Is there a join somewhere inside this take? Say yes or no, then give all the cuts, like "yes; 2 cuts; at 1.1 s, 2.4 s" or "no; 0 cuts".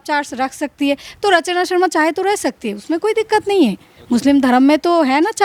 no; 0 cuts